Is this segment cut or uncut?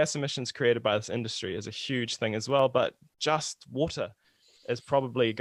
uncut